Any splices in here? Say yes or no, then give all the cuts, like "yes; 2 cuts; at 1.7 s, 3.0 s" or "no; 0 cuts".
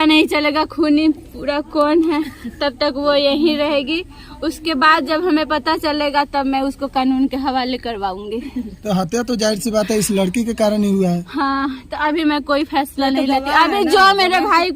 no; 0 cuts